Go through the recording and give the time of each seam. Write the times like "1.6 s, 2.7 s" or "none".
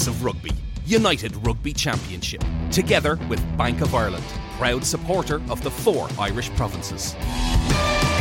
none